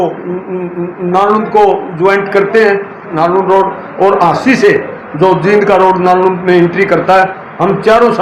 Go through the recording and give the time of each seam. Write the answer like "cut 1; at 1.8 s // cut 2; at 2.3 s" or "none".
cut 1; at 3.1 s